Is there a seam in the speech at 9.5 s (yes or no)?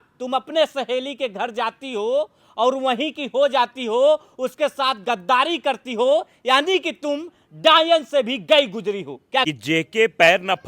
yes